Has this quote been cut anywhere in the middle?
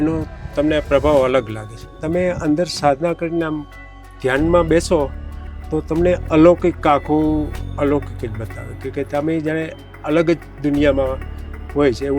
yes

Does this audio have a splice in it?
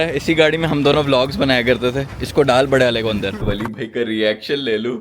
yes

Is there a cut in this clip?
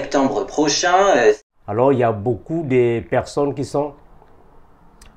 no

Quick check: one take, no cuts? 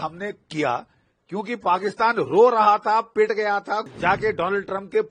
no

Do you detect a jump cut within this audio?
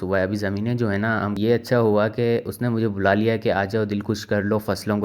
yes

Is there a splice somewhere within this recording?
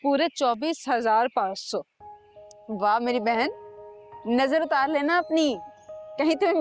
no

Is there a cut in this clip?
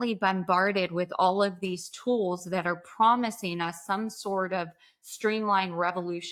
no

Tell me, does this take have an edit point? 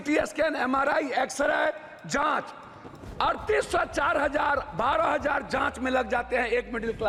no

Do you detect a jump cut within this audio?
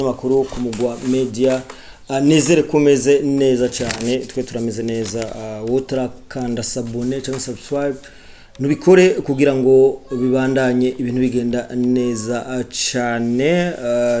no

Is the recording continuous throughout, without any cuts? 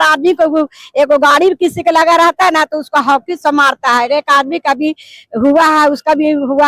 yes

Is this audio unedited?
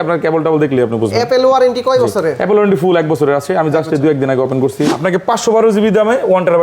no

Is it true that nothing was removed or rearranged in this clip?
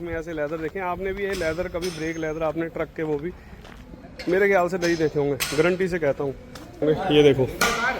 no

